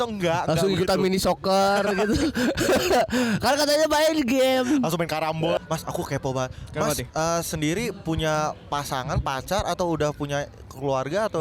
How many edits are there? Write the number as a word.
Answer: one